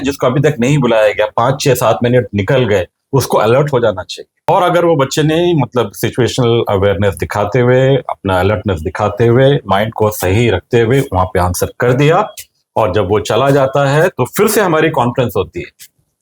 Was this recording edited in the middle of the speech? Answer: yes; 1 cut; at 4.5 s

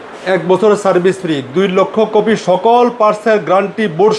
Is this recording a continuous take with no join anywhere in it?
yes; 0 cuts

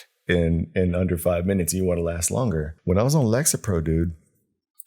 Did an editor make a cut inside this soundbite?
yes; 1 cut; at 2.7 s

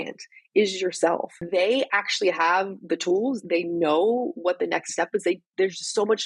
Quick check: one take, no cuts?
no; 2 cuts; at 1.4 s, 3.4 s

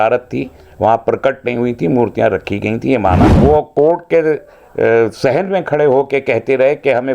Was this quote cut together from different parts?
yes; 1 cut; at 3.3 s

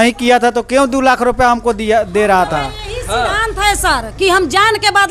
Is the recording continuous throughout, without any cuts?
yes; 0 cuts

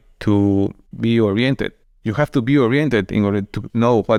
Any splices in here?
no; 0 cuts

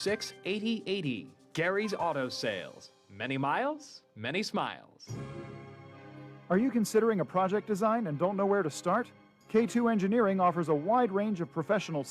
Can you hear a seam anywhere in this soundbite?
yes; 1 cut; at 4.9 s

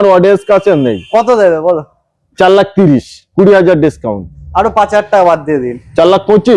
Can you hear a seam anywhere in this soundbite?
no; 0 cuts

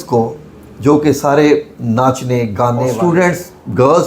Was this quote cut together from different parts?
yes; 1 cut; at 2.9 s

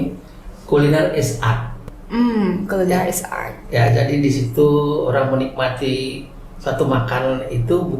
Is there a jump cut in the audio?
no; 0 cuts

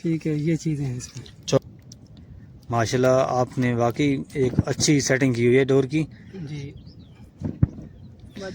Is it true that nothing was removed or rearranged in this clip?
no; 1 cut; at 1.6 s

